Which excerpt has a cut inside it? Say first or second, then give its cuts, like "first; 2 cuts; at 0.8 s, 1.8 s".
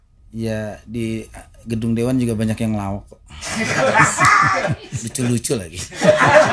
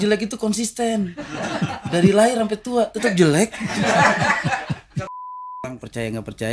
second; 1 cut; at 5.6 s